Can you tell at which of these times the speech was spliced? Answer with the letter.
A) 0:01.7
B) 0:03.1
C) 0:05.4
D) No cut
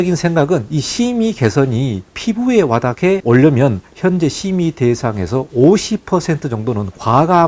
B